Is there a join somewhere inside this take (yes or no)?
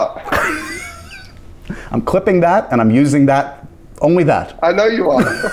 no